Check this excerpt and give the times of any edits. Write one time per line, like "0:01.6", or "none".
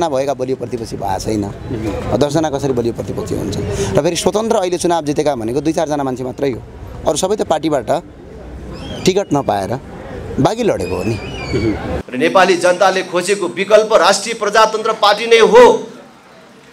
0:12.0